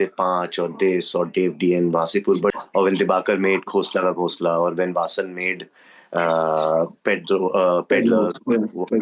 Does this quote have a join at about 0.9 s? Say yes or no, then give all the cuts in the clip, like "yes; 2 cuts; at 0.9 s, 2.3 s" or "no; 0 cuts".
no; 1 cut; at 2.6 s